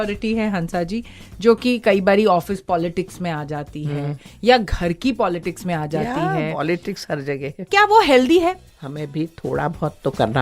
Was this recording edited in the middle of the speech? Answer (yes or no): yes